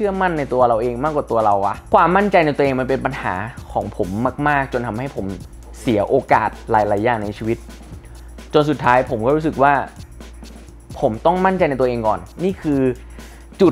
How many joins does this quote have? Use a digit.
1